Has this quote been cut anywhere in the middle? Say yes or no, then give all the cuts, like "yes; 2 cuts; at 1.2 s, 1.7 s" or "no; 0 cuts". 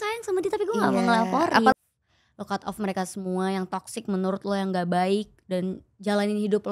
yes; 1 cut; at 1.7 s